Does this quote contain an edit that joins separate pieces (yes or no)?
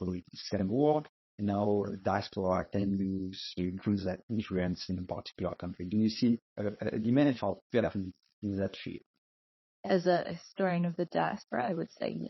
no